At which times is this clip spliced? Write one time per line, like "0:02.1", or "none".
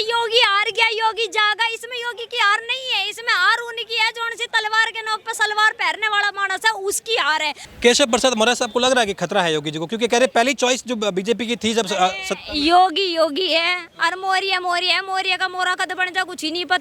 0:07.7